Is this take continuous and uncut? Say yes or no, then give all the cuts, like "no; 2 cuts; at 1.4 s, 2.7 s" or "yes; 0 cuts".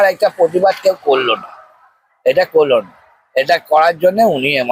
yes; 0 cuts